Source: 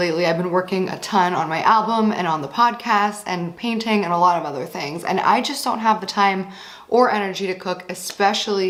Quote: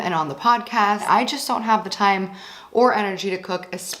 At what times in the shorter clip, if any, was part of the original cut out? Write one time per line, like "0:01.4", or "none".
0:01.0